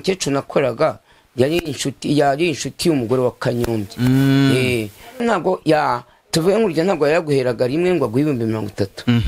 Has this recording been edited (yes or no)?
yes